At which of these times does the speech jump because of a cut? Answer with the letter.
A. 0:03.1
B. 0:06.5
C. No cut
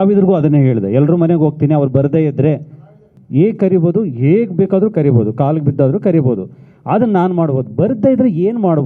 A